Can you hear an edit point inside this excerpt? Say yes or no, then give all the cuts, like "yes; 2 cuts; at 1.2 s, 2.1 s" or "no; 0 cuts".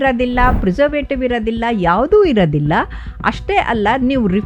no; 0 cuts